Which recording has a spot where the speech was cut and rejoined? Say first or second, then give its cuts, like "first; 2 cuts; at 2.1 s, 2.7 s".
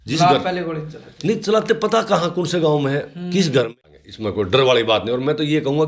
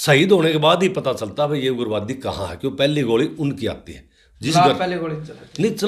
first; 1 cut; at 3.7 s